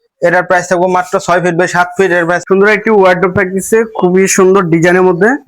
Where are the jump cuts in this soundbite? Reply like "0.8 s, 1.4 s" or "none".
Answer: 2.4 s

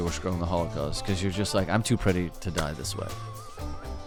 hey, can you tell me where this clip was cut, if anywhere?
none

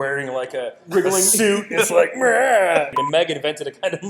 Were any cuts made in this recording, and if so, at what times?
2.9 s

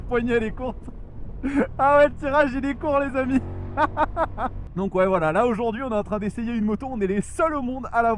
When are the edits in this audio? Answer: 4.6 s

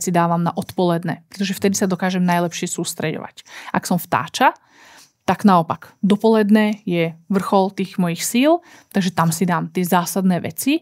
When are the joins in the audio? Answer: none

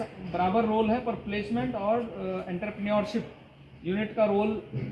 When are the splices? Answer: none

